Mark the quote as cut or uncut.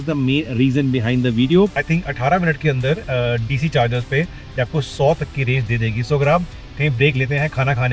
cut